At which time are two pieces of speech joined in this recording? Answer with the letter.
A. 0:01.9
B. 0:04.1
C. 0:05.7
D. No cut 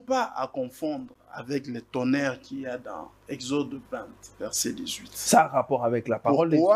D